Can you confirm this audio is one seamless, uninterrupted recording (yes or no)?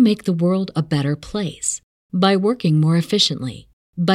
yes